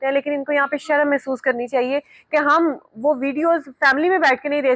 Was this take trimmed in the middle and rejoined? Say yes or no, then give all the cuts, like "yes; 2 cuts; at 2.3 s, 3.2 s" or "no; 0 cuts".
no; 0 cuts